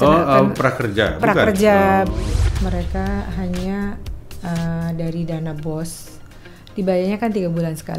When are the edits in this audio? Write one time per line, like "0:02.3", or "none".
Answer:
0:02.5